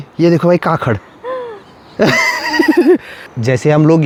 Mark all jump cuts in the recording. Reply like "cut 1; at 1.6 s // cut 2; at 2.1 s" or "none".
none